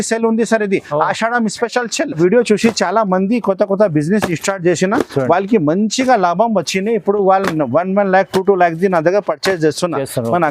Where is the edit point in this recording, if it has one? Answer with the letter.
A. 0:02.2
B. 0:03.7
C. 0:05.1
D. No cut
A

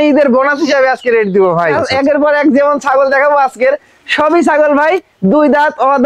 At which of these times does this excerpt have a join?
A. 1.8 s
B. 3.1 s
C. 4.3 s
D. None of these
A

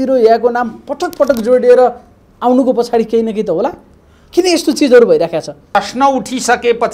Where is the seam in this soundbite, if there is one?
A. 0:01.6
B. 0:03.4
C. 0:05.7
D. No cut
C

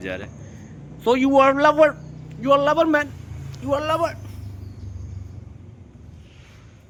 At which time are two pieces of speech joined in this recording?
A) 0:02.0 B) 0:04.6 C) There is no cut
C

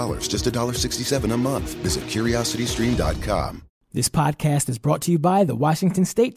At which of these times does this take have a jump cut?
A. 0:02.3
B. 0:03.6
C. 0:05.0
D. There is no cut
B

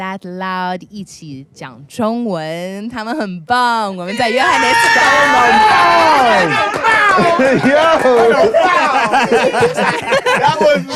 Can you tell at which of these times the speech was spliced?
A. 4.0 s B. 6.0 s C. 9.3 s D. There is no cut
D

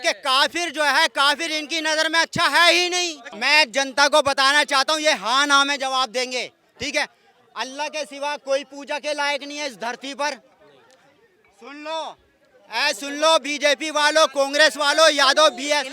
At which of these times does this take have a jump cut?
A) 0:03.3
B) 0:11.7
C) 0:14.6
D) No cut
A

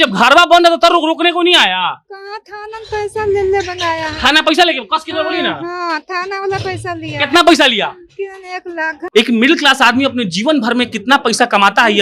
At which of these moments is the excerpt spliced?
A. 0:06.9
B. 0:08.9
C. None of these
B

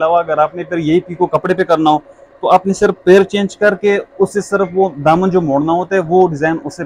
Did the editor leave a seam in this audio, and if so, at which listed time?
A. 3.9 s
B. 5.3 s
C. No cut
C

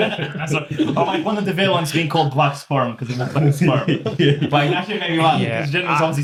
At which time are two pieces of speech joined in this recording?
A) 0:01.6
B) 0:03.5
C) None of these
C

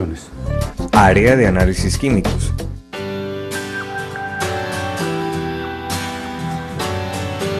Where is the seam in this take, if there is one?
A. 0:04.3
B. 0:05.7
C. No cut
A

